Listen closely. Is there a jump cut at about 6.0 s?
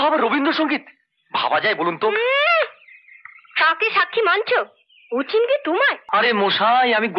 yes; 1 cut; at 6.0 s

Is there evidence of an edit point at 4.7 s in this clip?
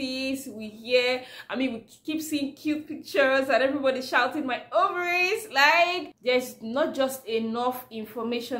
no; 1 cut; at 6.2 s

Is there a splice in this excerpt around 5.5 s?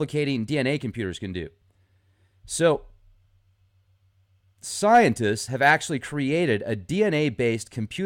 yes; 1 cut; at 5.5 s

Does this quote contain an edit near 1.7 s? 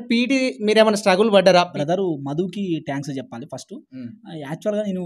yes; 1 cut; at 1.7 s

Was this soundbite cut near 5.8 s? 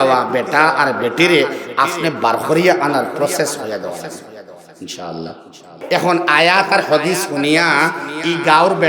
yes; 1 cut; at 5.8 s

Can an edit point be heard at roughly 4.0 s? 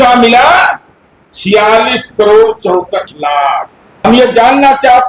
yes; 1 cut; at 4.0 s

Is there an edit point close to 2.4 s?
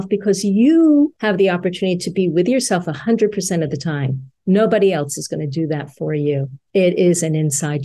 no; 2 cuts; at 1.2 s, 6.6 s

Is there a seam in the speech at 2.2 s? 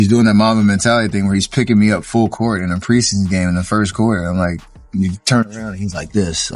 no; 0 cuts

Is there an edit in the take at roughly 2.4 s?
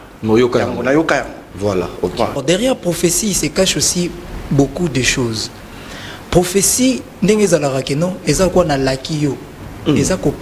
yes; 1 cut; at 2.4 s

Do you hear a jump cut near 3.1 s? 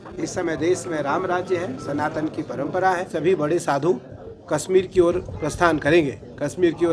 yes; 1 cut; at 3.1 s

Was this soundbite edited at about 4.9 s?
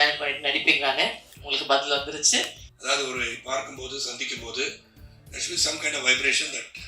no; 1 cut; at 2.6 s

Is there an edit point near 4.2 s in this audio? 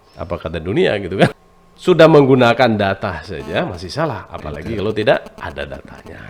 no; 1 cut; at 1.3 s

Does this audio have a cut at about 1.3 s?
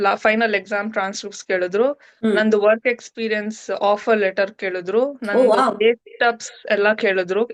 no; 0 cuts

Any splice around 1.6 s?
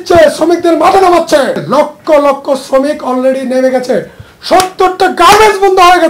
yes; 1 cut; at 1.6 s

